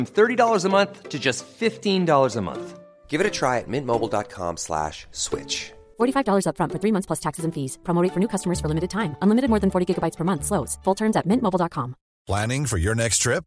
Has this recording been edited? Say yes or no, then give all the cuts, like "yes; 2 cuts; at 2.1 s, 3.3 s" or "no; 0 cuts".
no; 0 cuts